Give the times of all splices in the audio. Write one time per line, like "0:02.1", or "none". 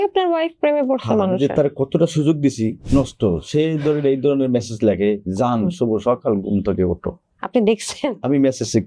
0:02.8
0:07.3